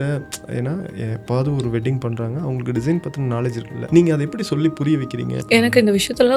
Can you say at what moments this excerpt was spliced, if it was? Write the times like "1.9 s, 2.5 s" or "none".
3.7 s, 5.3 s

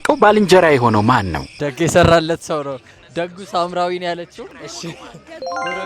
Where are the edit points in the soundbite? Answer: 1.7 s, 4.5 s

